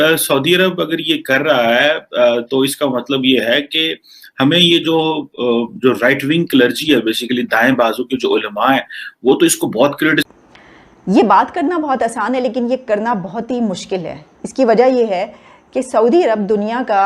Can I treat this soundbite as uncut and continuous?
no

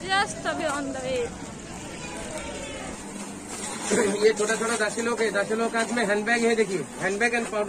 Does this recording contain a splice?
yes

